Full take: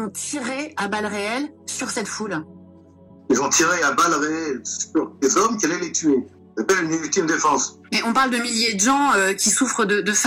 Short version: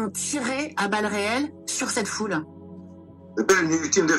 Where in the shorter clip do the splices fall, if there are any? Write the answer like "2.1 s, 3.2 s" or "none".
3.1 s